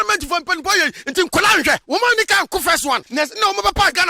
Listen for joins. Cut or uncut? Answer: cut